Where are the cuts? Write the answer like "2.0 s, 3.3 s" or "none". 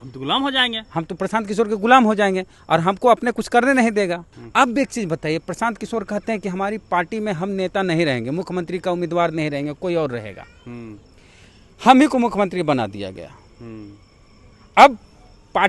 4.4 s